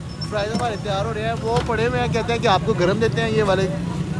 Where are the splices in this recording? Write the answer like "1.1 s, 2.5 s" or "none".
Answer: none